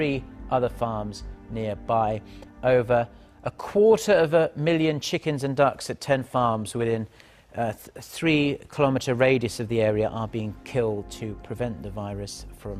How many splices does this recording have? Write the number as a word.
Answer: one